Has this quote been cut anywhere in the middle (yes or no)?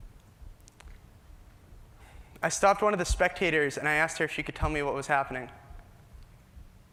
no